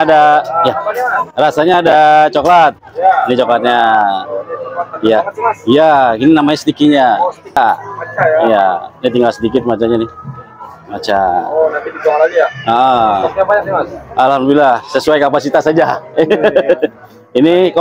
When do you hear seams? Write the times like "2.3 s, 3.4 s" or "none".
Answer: 7.6 s

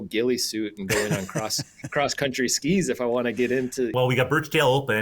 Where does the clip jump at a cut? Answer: 3.9 s

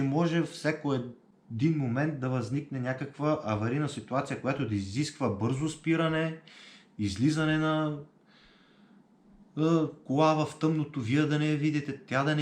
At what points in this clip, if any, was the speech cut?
none

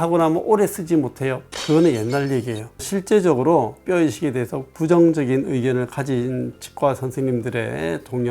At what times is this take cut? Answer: 2.7 s

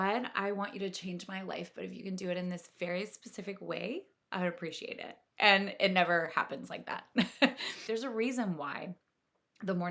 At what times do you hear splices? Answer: 7.8 s

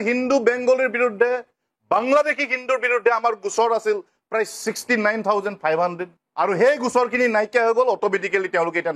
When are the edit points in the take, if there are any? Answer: none

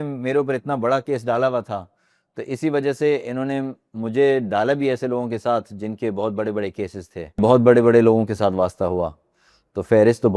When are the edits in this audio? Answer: 7.4 s

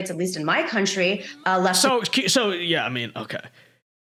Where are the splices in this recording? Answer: none

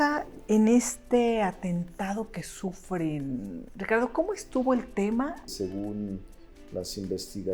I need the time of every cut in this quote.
5.5 s

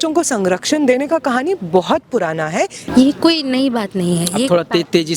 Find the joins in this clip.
2.8 s

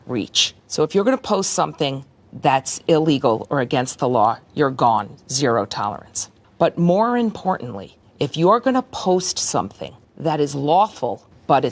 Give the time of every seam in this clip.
none

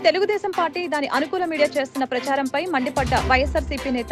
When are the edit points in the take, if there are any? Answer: none

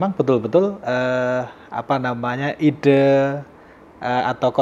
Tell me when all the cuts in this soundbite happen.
none

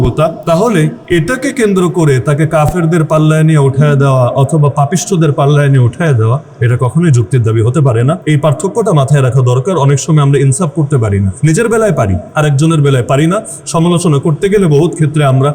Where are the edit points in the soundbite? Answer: 0.7 s, 8.2 s, 11.3 s, 12.2 s

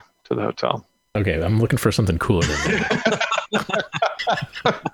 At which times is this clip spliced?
none

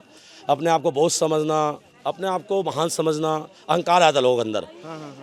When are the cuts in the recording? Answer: none

